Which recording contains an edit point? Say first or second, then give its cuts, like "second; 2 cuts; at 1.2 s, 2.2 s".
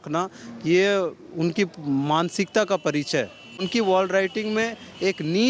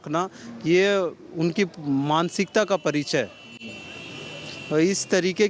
first; 1 cut; at 3.7 s